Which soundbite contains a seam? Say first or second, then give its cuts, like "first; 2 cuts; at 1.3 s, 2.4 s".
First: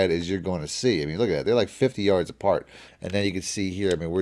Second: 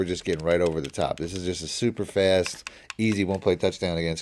first; 1 cut; at 2.8 s